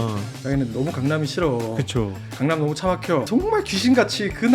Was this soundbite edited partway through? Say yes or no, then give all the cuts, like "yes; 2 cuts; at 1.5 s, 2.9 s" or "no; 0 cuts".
yes; 1 cut; at 3.3 s